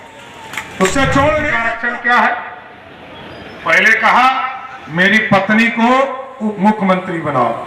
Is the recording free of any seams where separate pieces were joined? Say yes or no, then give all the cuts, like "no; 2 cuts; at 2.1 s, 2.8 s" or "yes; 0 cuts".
no; 1 cut; at 1.7 s